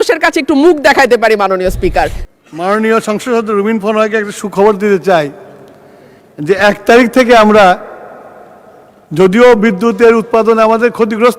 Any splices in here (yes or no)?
yes